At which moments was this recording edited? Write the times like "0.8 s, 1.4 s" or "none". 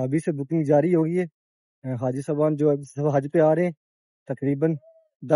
none